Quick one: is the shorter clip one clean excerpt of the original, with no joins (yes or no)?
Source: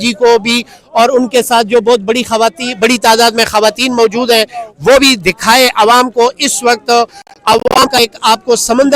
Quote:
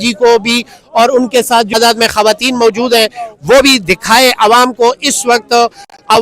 no